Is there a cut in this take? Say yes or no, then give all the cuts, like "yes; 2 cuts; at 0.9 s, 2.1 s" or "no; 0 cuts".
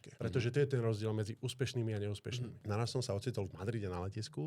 yes; 1 cut; at 2.6 s